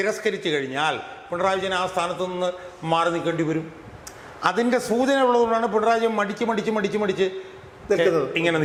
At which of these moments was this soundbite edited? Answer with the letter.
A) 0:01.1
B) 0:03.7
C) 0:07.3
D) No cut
D